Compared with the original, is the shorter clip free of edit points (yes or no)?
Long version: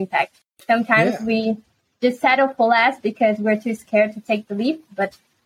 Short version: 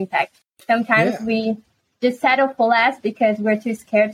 yes